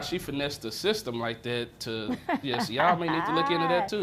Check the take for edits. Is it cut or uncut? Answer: uncut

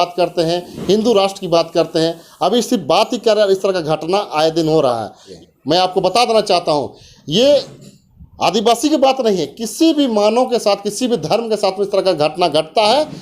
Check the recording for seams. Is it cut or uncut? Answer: cut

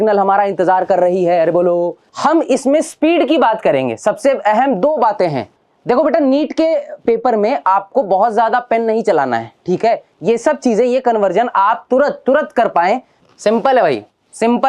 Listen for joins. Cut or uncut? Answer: cut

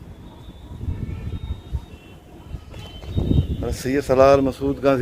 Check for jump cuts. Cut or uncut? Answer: uncut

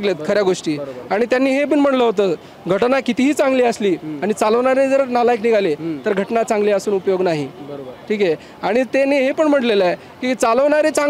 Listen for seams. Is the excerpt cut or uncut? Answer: uncut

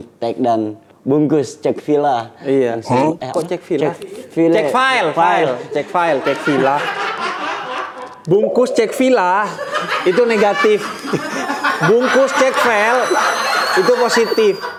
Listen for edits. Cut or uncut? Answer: uncut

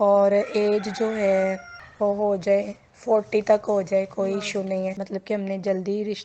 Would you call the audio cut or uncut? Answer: cut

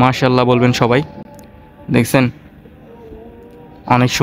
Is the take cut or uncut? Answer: uncut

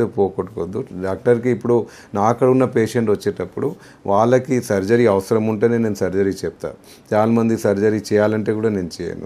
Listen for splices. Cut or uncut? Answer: uncut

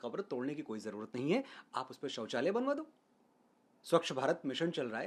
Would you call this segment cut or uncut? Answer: uncut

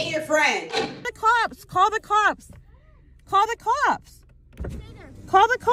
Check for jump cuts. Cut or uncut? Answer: cut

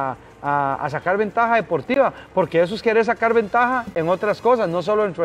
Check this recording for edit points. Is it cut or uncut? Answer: uncut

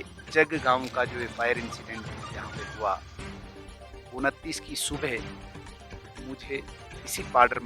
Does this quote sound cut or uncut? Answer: uncut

